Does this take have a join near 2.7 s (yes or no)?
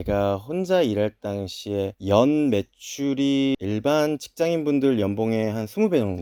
no